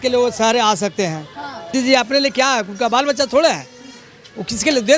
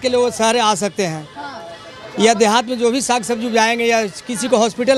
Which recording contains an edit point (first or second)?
first